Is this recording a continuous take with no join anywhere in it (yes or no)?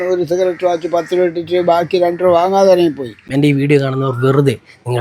no